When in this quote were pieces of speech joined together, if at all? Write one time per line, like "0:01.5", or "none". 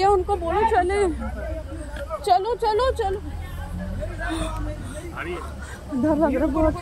none